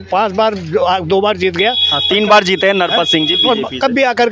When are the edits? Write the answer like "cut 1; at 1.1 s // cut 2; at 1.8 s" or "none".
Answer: none